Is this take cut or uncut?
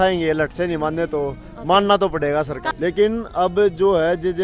cut